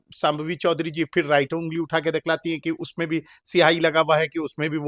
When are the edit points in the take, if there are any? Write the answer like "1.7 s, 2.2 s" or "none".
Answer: none